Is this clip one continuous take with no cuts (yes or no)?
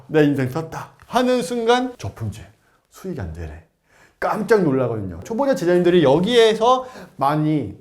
no